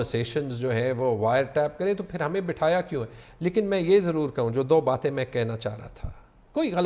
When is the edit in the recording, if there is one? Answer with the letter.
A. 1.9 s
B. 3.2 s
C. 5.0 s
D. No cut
D